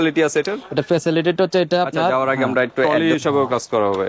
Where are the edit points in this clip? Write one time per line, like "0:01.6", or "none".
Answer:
0:02.9